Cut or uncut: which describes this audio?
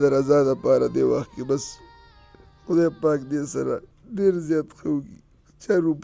uncut